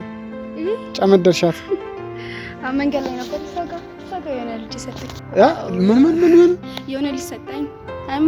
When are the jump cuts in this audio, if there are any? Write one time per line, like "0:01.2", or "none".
none